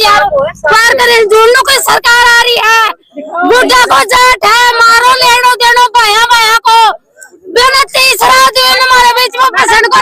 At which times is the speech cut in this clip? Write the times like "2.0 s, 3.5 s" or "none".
none

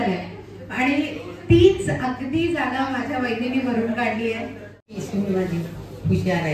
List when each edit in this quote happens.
4.9 s

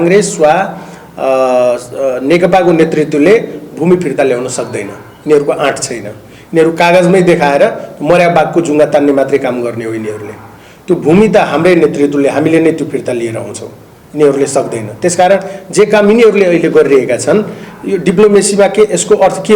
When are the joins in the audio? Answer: none

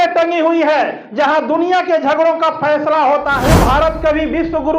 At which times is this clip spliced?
3.4 s

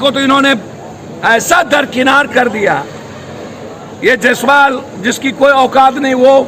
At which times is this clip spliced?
none

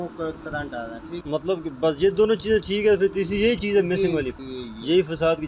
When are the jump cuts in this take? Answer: 1.2 s, 4.3 s

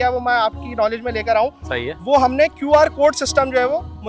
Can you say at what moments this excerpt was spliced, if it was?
none

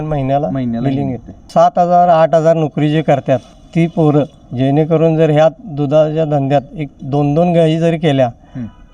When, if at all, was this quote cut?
1.4 s, 3.6 s, 4.4 s

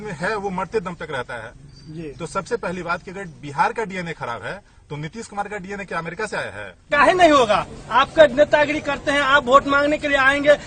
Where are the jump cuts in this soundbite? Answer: 6.9 s

